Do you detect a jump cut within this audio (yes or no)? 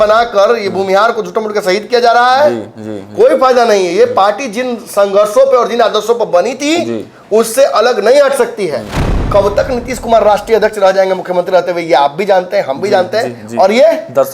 yes